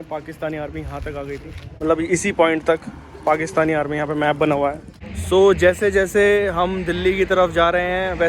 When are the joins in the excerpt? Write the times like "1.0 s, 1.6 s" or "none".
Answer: 1.7 s, 5.2 s

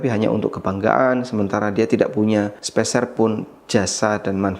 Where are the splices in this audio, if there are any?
2.6 s

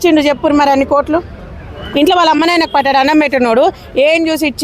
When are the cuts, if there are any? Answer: none

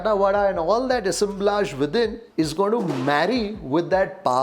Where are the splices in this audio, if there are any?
2.2 s

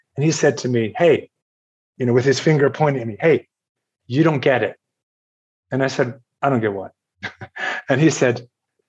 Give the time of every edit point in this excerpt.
4.0 s

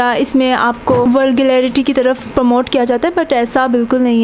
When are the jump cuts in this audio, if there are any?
1.1 s

